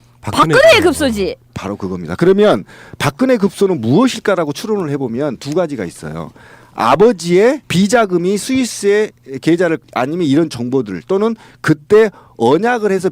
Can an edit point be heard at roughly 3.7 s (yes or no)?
yes